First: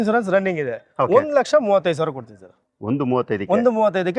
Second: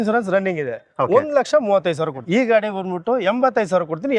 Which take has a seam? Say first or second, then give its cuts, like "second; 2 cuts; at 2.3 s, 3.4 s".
second; 1 cut; at 2.2 s